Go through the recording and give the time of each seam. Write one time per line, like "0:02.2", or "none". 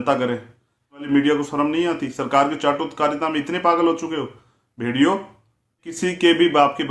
0:01.1
0:05.9